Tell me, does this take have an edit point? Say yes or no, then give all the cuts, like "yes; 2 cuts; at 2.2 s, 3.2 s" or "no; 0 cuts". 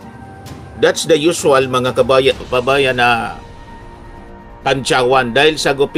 no; 0 cuts